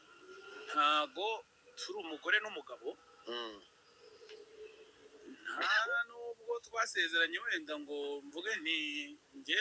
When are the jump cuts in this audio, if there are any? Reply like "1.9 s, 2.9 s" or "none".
none